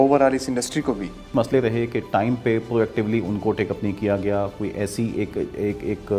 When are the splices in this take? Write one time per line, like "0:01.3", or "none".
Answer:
0:01.3